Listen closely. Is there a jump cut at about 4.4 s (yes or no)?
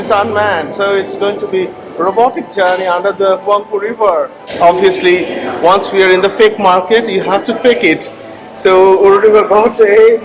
yes